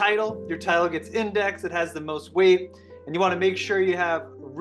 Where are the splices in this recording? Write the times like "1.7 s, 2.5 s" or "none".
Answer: none